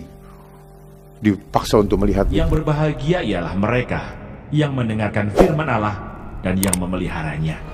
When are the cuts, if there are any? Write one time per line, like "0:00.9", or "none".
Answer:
0:02.4